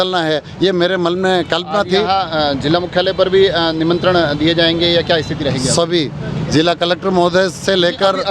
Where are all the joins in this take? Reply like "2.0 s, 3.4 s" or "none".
none